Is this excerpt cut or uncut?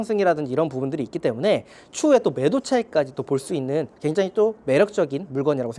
uncut